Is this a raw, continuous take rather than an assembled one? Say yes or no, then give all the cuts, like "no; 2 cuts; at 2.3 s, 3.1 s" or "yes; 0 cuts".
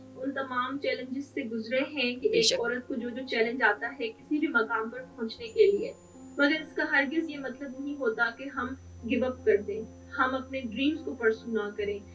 yes; 0 cuts